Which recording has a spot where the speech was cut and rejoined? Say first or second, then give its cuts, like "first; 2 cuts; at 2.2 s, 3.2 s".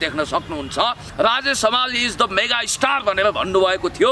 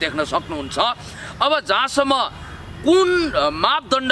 first; 1 cut; at 1.0 s